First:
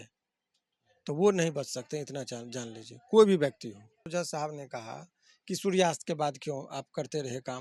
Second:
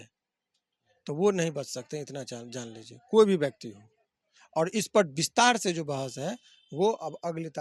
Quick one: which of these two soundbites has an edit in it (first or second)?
first